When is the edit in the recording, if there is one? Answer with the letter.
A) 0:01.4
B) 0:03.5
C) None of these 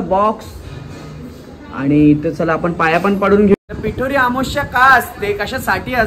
B